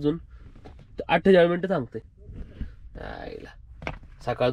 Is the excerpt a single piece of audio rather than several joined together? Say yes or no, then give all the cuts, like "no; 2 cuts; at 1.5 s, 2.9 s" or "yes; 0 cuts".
yes; 0 cuts